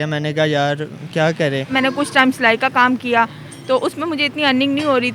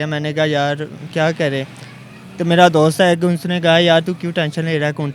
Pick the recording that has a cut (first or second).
first